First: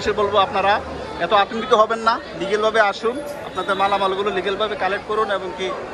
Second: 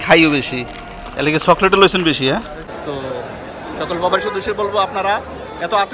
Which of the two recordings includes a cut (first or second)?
second